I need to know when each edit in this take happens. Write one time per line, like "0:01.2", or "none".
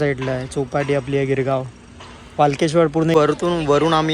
0:03.1

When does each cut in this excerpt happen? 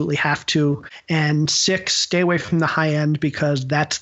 0:00.9

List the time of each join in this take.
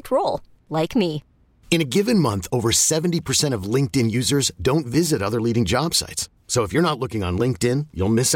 none

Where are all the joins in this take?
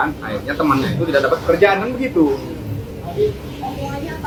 none

